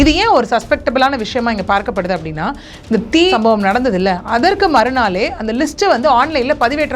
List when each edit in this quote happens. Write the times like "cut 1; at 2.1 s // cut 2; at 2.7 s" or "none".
cut 1; at 3.3 s